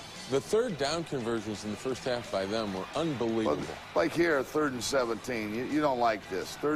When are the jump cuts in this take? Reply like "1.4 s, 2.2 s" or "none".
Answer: none